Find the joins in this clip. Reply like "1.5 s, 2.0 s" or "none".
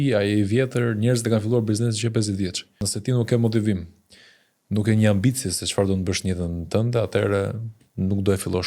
2.9 s